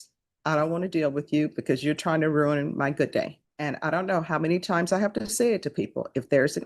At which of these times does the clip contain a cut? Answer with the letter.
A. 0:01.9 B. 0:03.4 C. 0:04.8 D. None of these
B